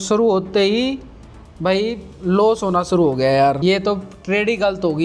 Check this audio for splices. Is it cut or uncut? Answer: cut